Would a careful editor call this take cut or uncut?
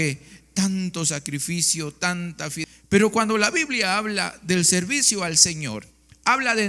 cut